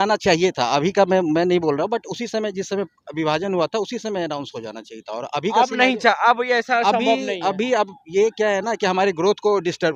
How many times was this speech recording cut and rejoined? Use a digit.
0